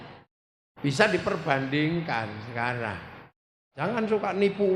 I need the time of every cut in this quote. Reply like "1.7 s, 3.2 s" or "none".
3.8 s